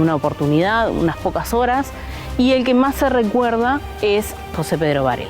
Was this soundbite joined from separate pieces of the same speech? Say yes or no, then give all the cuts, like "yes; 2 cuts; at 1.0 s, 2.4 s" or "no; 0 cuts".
yes; 1 cut; at 4.4 s